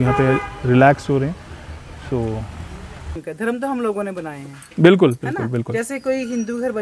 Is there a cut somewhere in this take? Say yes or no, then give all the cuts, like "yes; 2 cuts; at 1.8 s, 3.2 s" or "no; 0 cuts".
yes; 1 cut; at 3.2 s